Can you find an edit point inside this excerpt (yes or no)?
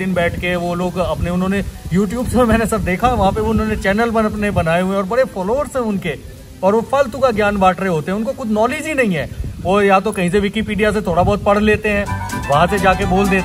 no